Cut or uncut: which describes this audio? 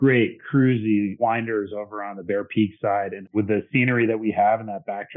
cut